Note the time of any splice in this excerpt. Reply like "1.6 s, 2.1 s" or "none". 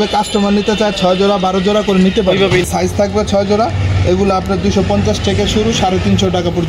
2.7 s